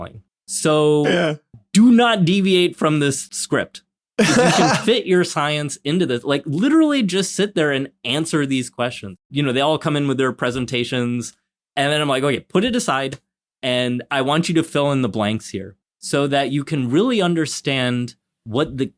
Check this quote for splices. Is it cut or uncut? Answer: cut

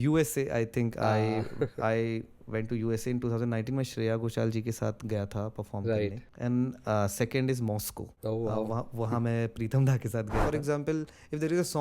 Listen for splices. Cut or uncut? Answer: cut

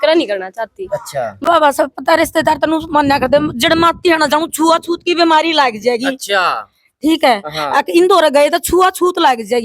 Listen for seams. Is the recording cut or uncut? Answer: cut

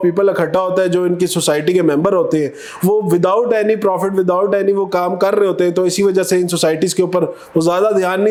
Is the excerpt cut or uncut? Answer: uncut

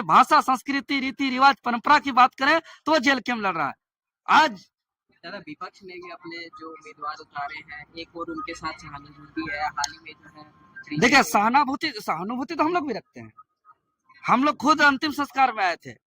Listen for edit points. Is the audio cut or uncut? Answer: uncut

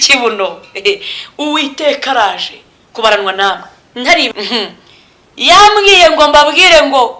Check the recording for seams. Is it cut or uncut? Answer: cut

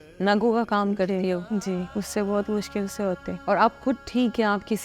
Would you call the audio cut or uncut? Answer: cut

